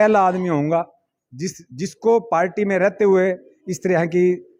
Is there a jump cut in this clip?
no; 0 cuts

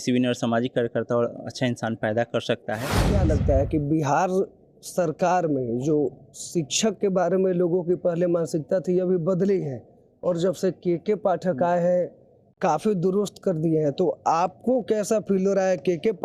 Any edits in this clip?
yes; 1 cut; at 2.9 s

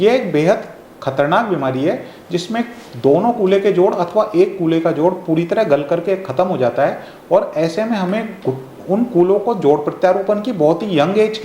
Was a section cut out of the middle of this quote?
no; 0 cuts

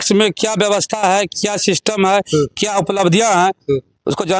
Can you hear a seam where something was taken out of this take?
no; 0 cuts

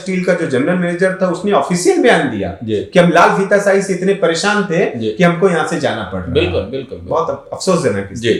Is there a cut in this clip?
no; 0 cuts

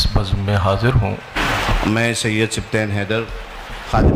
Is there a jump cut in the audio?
yes; 1 cut; at 1.2 s

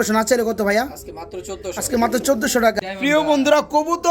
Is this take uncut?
no; 1 cut; at 2.8 s

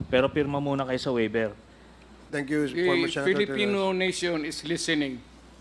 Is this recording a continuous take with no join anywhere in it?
no; 1 cut; at 2.3 s

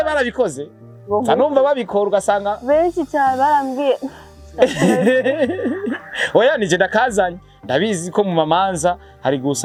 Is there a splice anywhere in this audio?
no; 0 cuts

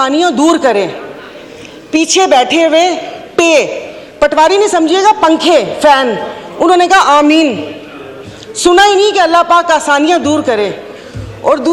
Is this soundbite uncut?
yes; 0 cuts

